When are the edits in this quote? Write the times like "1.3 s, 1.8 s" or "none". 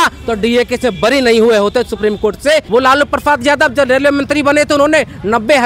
2.7 s

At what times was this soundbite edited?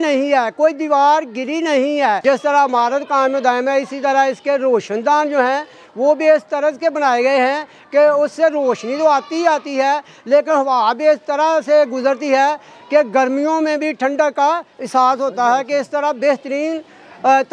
2.2 s

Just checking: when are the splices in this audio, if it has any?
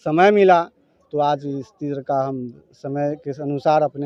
none

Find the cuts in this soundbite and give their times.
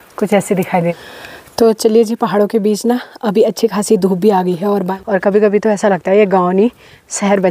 1.0 s, 4.9 s

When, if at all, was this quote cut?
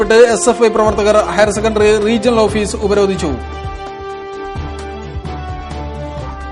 none

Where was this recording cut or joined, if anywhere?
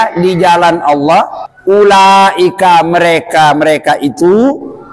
1.4 s

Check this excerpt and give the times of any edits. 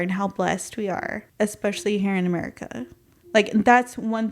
1.2 s

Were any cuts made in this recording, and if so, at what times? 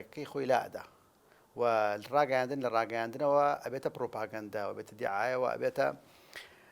none

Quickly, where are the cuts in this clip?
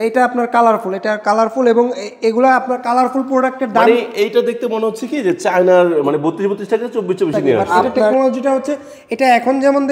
7.7 s

